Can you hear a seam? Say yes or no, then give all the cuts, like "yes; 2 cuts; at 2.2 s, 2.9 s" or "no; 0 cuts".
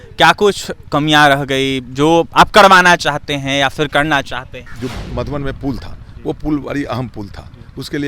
yes; 1 cut; at 4.6 s